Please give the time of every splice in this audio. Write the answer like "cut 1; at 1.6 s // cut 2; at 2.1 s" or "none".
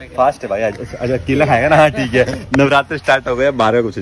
none